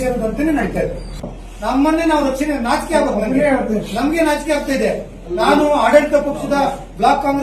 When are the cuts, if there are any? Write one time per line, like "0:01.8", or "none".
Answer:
0:01.2